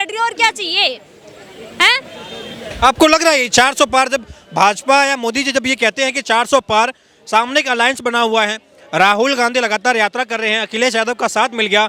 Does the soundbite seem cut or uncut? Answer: uncut